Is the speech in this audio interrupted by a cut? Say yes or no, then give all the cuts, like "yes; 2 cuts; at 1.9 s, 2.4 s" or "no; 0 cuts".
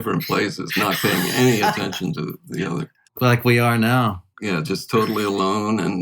yes; 2 cuts; at 3.2 s, 4.3 s